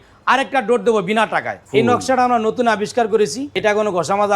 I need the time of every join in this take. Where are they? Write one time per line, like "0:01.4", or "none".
0:01.5
0:03.4

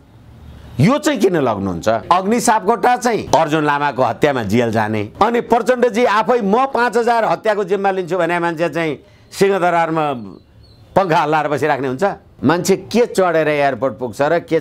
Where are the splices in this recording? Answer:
0:02.0
0:03.2
0:05.1
0:12.3

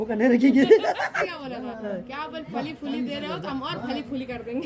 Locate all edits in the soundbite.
0:01.2

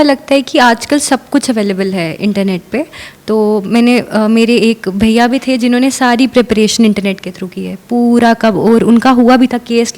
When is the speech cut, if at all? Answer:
none

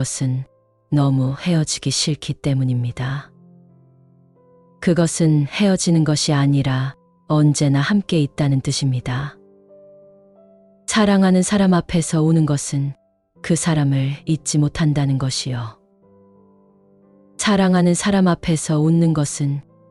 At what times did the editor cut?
none

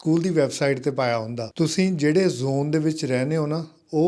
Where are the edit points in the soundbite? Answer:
0:01.4

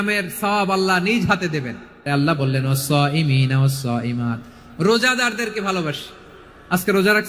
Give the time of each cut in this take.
0:02.1

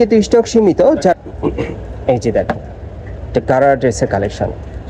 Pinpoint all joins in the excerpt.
0:01.1

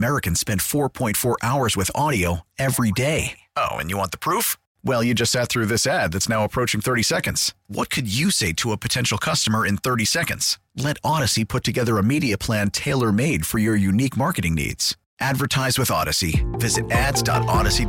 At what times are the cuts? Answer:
none

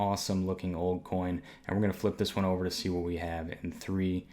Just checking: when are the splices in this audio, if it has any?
none

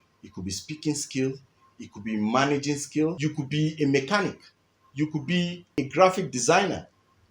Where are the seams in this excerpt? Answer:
0:03.2
0:05.7

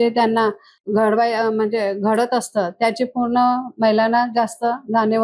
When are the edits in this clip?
none

